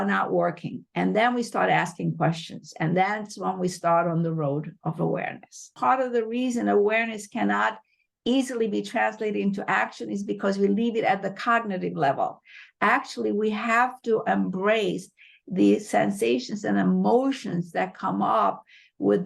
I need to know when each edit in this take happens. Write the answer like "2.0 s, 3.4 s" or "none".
5.7 s